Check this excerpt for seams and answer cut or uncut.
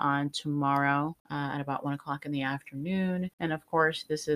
cut